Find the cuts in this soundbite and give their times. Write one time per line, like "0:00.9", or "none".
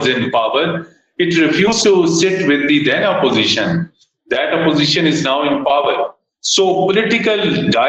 none